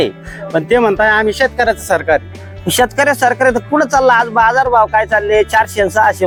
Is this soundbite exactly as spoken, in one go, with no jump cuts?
yes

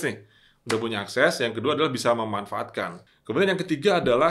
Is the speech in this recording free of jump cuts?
no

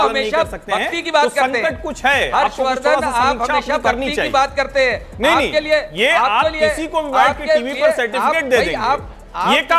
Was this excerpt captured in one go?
yes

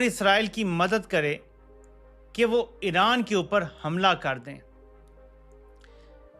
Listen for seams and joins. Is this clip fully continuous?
no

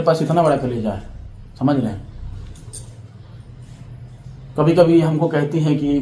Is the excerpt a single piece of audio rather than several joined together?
yes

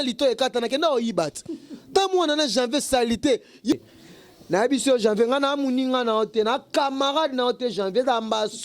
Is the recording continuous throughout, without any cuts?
no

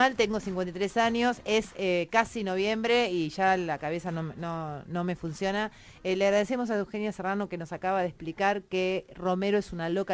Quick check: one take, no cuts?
yes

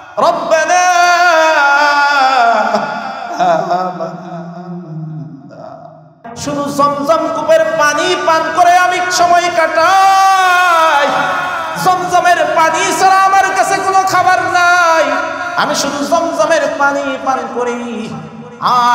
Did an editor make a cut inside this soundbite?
yes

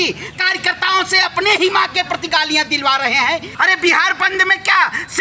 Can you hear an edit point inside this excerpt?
yes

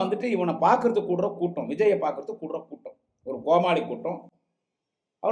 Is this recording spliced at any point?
no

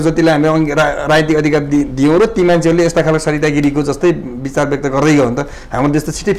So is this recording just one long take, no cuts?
yes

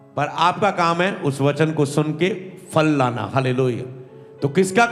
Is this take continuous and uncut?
yes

